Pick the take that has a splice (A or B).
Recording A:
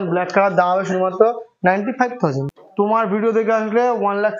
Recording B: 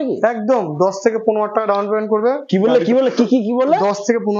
A